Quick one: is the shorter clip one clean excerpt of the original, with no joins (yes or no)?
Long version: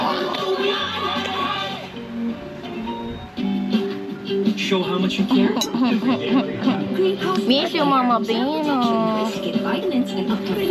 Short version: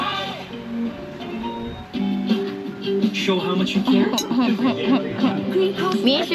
yes